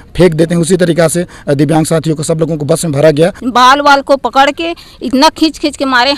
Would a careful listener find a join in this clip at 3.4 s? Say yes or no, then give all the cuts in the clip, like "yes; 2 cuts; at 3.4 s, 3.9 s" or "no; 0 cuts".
yes; 1 cut; at 3.4 s